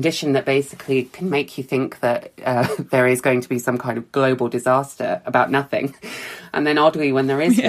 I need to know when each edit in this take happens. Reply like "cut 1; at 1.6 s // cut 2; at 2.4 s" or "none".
none